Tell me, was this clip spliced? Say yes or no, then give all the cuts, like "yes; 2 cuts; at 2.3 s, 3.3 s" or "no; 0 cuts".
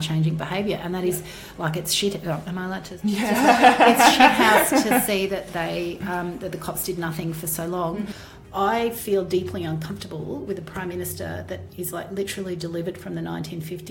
yes; 1 cut; at 8.2 s